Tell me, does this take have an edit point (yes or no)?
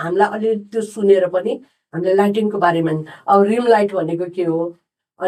no